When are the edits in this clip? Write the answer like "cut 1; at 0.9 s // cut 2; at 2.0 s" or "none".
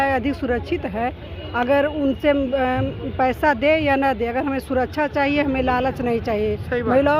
none